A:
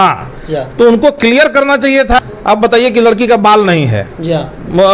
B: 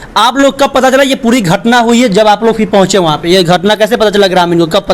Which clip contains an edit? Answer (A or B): A